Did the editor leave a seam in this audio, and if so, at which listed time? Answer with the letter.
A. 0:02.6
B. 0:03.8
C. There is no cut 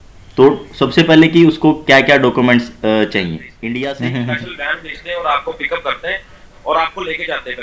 B